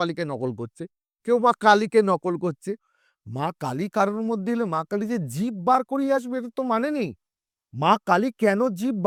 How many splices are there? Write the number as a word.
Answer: zero